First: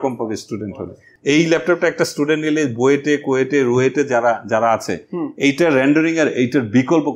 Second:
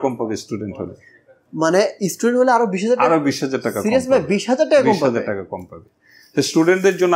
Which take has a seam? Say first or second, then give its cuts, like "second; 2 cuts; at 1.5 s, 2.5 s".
first; 1 cut; at 1.1 s